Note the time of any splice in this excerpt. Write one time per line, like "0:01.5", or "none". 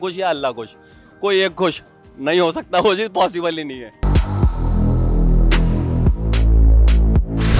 none